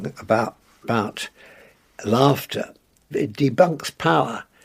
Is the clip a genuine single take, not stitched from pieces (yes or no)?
no